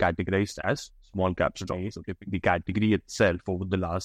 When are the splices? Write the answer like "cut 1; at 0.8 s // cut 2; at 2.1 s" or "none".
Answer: cut 1; at 2.0 s